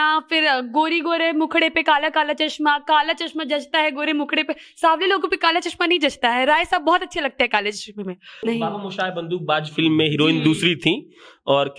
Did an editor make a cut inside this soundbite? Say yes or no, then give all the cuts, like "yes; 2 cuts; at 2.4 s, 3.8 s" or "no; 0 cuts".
yes; 1 cut; at 8.4 s